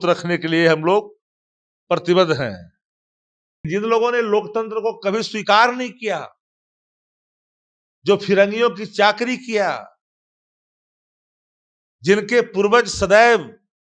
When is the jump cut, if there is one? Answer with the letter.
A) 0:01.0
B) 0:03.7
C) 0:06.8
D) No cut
B